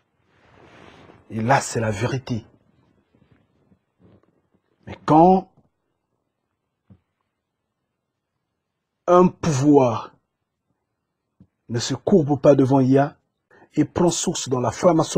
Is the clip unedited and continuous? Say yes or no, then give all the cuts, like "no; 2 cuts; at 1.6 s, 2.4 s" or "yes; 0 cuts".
yes; 0 cuts